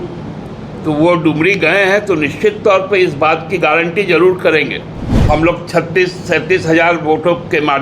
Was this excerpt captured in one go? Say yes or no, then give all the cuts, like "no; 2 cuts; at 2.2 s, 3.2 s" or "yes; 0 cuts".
no; 1 cut; at 5.1 s